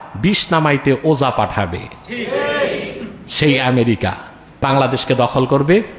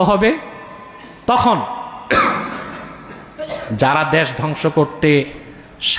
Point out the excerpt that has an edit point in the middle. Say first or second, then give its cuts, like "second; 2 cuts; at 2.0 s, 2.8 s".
first; 1 cut; at 4.6 s